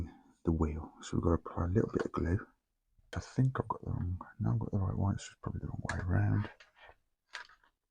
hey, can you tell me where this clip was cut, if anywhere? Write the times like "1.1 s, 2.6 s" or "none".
3.1 s